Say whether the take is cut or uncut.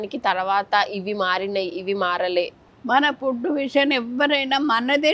cut